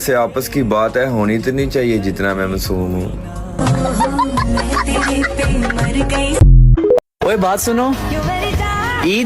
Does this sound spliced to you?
yes; 1 cut; at 7.0 s

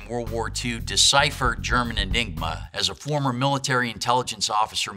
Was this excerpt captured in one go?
no; 1 cut; at 2.6 s

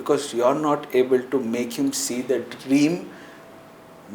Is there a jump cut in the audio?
no; 0 cuts

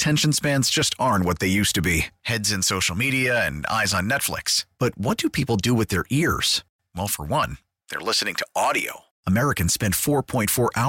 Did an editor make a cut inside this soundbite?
no; 0 cuts

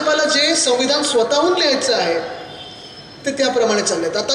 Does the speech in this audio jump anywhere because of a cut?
no; 0 cuts

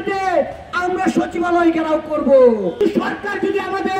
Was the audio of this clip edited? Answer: yes; 1 cut; at 2.8 s

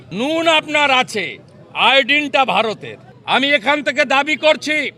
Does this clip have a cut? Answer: no; 0 cuts

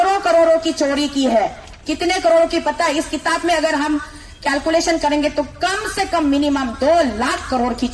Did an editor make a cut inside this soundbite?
no; 0 cuts

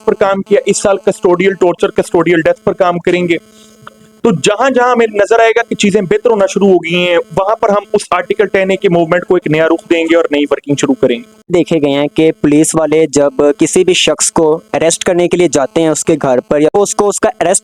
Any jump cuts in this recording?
no; 0 cuts

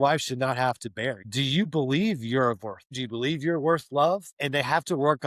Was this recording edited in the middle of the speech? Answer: yes; 3 cuts; at 1.2 s, 2.9 s, 4.3 s

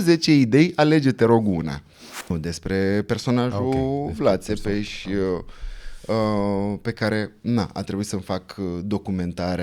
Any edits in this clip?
yes; 1 cut; at 2.3 s

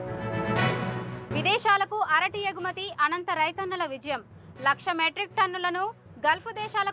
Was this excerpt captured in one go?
no; 1 cut; at 0.9 s

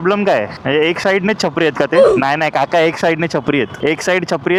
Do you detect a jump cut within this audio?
no; 0 cuts

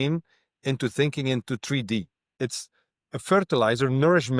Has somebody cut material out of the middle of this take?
yes; 1 cut; at 2.3 s

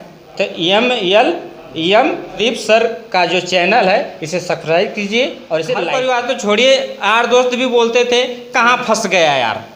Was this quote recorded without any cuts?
no; 2 cuts; at 2.4 s, 5.8 s

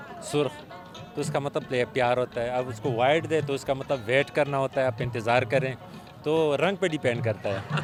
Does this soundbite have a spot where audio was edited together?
no; 0 cuts

